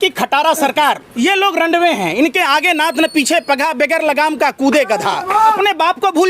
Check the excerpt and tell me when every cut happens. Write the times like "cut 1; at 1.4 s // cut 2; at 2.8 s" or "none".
cut 1; at 1.1 s // cut 2; at 5.5 s

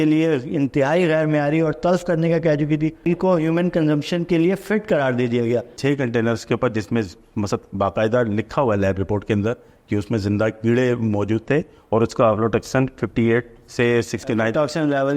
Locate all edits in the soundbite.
cut 1; at 3.0 s // cut 2; at 5.8 s

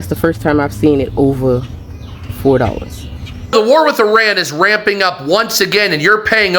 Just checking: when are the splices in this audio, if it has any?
cut 1; at 3.5 s

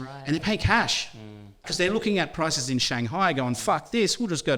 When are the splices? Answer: cut 1; at 1.7 s

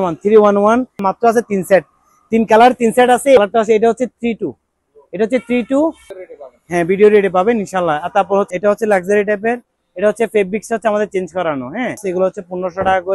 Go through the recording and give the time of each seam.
cut 1; at 1.0 s // cut 2; at 3.4 s // cut 3; at 6.0 s // cut 4; at 8.5 s // cut 5; at 12.0 s

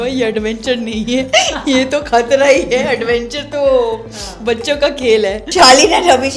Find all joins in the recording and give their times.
cut 1; at 5.4 s

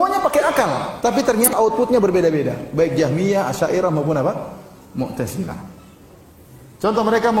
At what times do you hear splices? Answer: cut 1; at 1.5 s

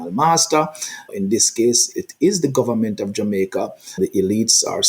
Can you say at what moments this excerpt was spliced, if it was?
cut 1; at 1.1 s // cut 2; at 3.9 s

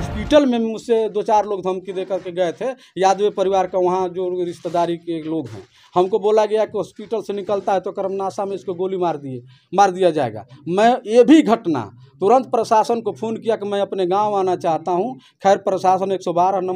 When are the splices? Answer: none

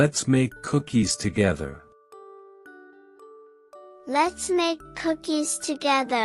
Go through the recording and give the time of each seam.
none

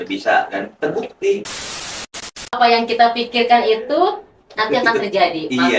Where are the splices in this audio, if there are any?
cut 1; at 2.0 s

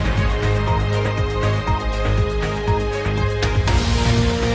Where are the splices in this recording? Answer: cut 1; at 3.5 s

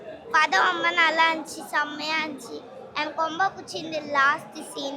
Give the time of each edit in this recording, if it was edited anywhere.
none

